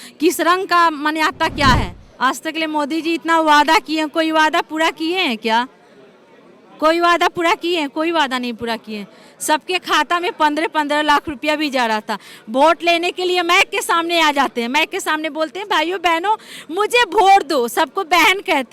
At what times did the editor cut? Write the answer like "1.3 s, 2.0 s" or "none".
2.0 s